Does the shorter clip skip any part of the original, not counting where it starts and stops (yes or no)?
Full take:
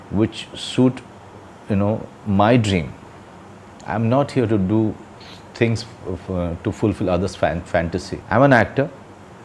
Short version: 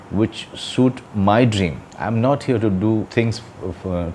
yes